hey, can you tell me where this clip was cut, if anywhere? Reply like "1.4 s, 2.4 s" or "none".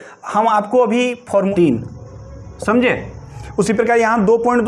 1.5 s

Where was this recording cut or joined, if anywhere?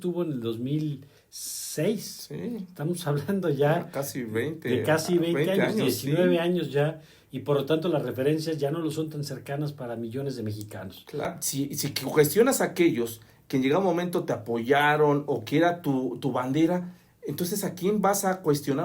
11.3 s

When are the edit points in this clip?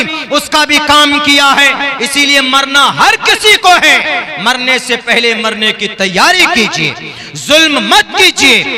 none

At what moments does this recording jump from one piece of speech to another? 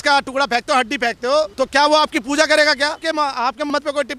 1.5 s, 3.0 s

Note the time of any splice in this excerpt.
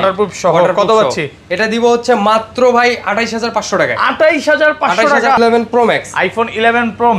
5.4 s

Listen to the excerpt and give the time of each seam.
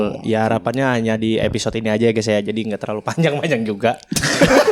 none

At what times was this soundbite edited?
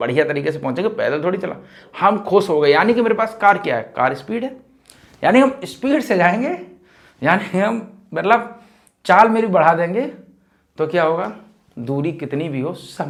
none

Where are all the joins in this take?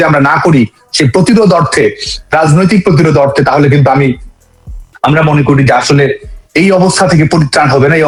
none

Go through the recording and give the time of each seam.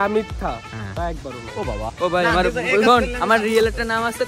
1.9 s

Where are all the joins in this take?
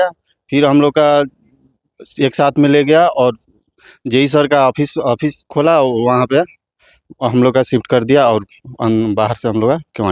none

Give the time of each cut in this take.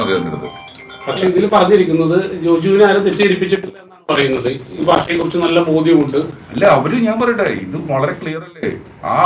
none

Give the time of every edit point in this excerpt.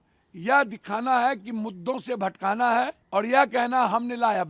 3.0 s

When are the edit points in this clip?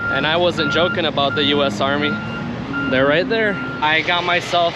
3.8 s

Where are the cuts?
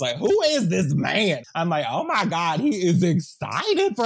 1.4 s

